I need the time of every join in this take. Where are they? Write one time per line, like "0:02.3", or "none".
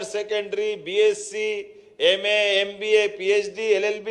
none